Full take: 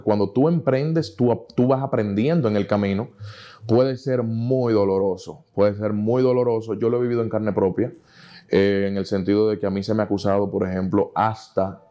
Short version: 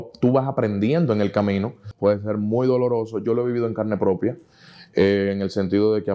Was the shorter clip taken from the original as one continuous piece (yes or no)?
no